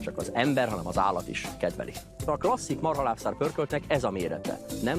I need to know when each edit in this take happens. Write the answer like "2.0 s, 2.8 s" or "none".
2.2 s